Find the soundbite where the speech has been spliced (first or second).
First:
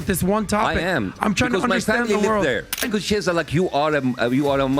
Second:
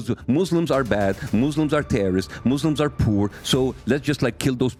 first